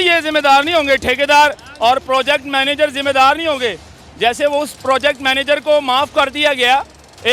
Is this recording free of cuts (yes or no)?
yes